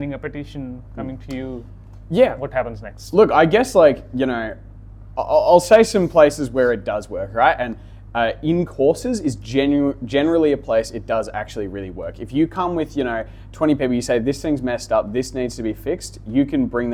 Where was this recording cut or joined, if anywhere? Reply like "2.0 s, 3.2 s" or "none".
none